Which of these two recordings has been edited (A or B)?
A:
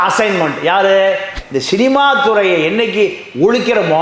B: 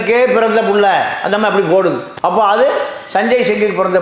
A